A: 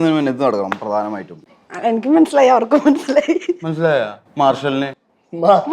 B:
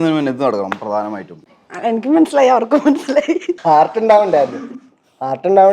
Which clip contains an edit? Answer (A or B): B